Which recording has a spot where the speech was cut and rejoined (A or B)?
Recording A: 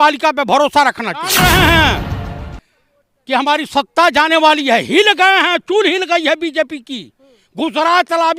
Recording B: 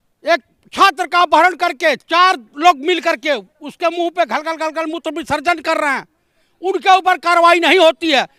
A